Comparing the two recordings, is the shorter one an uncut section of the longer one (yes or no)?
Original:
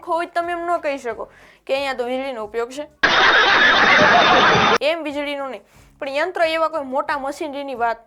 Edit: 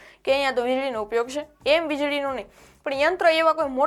no